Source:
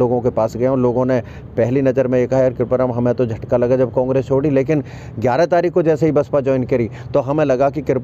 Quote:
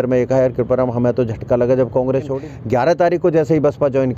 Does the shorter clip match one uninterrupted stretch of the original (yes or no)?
no